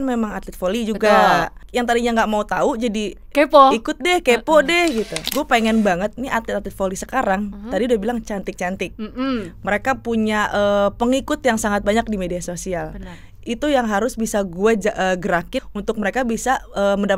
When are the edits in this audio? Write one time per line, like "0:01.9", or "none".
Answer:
0:01.6
0:05.2
0:15.6